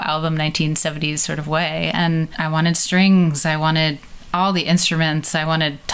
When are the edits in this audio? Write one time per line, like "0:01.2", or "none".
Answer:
none

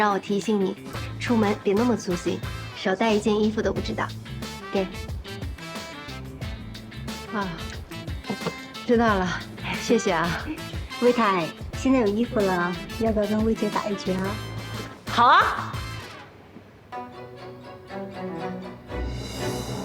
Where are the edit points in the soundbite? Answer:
0:16.7

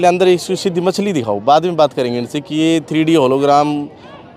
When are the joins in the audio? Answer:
none

